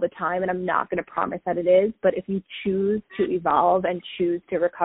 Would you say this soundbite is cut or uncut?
uncut